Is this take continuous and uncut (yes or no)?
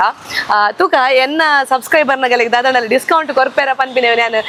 yes